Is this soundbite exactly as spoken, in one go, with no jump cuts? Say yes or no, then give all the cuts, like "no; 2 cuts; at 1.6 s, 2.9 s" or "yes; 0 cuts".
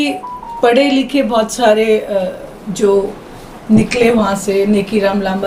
yes; 0 cuts